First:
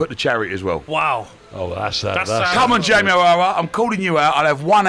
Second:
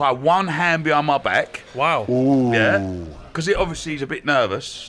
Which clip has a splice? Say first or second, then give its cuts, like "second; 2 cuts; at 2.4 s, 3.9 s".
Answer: first; 1 cut; at 1.4 s